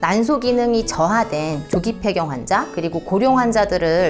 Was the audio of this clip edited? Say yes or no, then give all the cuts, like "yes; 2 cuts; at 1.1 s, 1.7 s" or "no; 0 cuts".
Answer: no; 0 cuts